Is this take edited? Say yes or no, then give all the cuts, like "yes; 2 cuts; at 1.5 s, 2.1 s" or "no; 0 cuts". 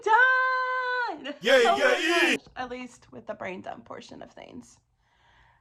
no; 0 cuts